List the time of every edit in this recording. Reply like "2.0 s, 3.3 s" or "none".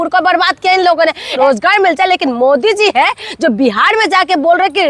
1.4 s